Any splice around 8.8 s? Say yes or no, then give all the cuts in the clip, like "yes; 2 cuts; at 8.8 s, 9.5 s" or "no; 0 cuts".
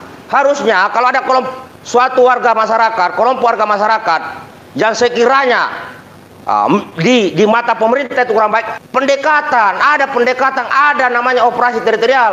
yes; 1 cut; at 8.8 s